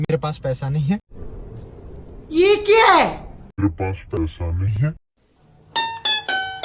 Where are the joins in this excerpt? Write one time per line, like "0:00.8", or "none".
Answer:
none

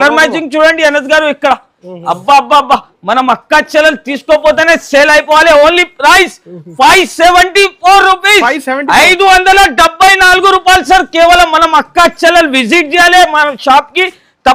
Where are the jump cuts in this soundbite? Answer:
none

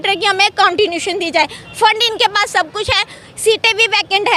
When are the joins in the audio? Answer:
none

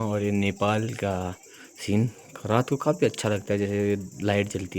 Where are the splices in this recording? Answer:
none

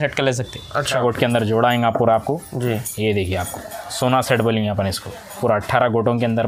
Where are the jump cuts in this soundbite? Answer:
0:01.0

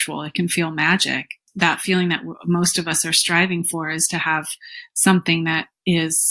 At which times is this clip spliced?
0:01.4

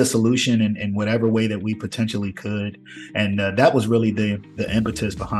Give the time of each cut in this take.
none

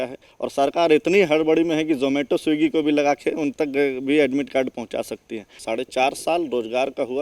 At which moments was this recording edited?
0:05.5

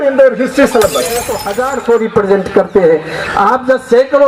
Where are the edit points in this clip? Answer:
0:01.4

